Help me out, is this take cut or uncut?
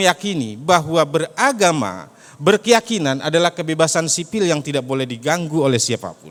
uncut